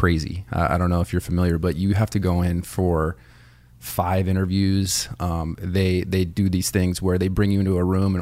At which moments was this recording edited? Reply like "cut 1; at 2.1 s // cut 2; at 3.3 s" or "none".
none

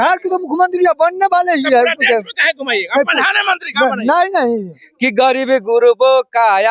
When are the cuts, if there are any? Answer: cut 1; at 4.8 s

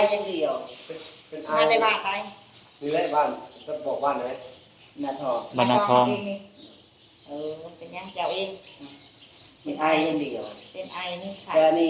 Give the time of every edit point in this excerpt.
none

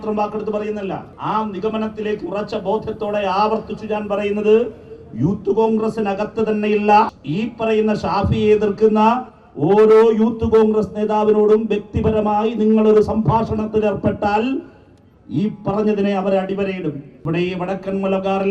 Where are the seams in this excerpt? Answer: cut 1; at 1.1 s // cut 2; at 7.2 s // cut 3; at 17.2 s

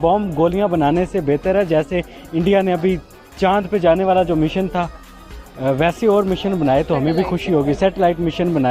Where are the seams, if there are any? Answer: none

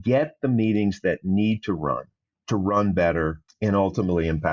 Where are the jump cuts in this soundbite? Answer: cut 1; at 3.5 s

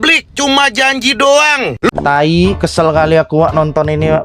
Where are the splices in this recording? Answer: cut 1; at 1.9 s

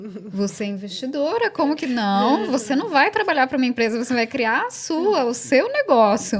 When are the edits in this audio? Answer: none

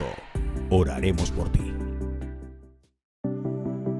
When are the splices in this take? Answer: cut 1; at 3.1 s

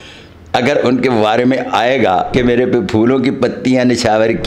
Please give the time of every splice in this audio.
cut 1; at 2.3 s

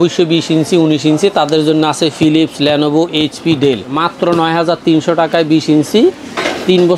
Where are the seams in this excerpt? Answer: cut 1; at 4.0 s

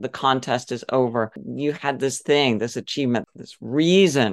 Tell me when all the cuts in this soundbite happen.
cut 1; at 1.4 s // cut 2; at 3.2 s

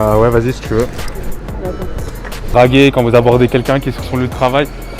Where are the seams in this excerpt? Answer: cut 1; at 2.5 s

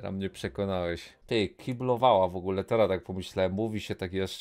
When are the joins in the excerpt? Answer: cut 1; at 1.1 s

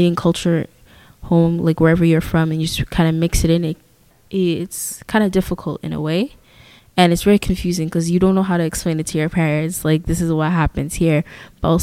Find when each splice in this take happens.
none

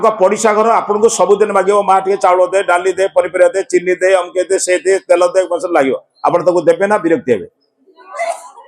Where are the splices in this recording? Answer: none

